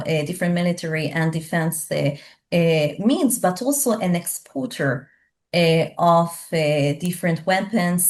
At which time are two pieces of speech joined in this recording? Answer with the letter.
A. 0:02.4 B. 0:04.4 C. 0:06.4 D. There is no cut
D